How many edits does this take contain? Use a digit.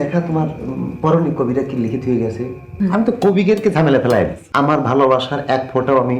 2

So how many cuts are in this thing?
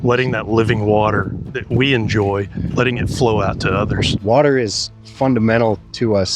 2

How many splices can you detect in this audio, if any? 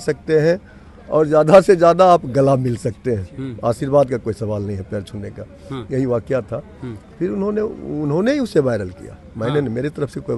0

